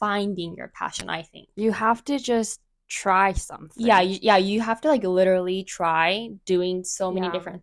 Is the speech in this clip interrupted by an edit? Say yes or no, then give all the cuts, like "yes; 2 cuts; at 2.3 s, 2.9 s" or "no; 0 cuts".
no; 0 cuts